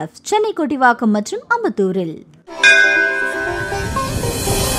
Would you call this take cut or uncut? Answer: cut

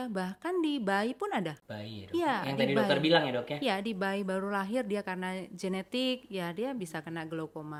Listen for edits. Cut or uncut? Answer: uncut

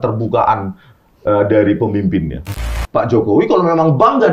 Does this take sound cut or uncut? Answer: cut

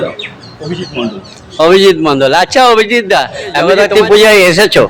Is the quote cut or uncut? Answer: cut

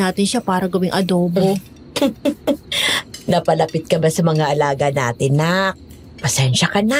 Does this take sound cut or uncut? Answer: uncut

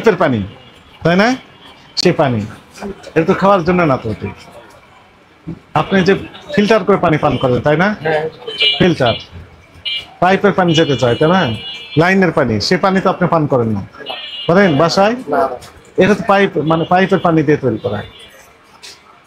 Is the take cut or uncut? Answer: uncut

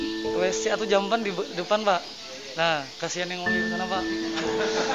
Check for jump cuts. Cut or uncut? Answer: uncut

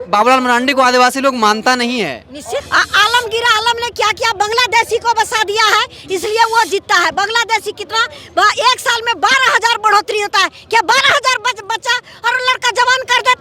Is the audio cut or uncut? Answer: cut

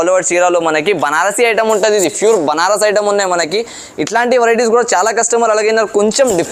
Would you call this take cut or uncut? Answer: uncut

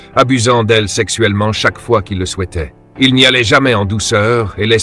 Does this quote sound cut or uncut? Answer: uncut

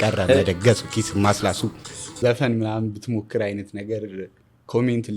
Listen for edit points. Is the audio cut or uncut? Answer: cut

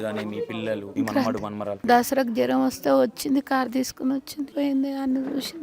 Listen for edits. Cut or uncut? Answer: cut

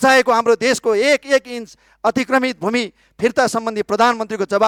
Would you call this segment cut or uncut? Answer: uncut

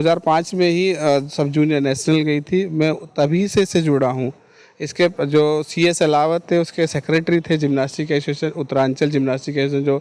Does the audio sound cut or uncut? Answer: uncut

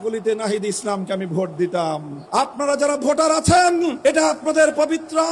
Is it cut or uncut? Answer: cut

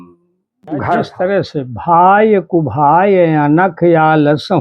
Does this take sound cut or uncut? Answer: cut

